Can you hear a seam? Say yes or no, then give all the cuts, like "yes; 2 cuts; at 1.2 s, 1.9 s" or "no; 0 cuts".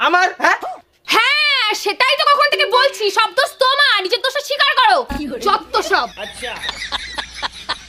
no; 0 cuts